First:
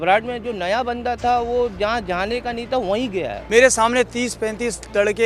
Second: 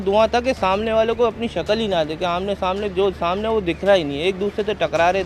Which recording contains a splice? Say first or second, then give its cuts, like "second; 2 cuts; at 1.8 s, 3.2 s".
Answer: first; 1 cut; at 3.4 s